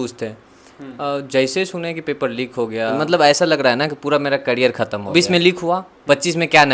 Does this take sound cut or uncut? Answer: cut